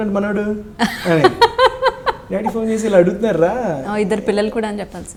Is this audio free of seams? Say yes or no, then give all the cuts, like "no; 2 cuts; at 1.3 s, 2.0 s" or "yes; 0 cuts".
yes; 0 cuts